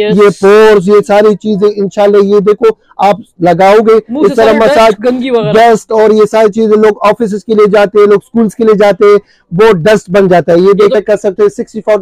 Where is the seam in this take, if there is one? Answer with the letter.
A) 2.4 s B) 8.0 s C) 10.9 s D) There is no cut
C